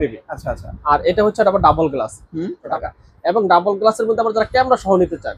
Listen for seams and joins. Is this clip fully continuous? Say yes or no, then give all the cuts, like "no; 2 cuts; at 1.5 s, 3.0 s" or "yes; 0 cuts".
no; 1 cut; at 2.6 s